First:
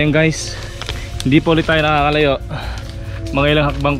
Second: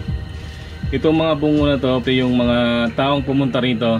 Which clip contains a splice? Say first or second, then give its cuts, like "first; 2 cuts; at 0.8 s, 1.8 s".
second; 1 cut; at 2.0 s